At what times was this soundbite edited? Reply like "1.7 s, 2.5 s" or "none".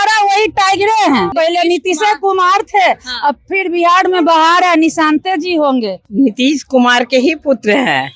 1.3 s, 6.0 s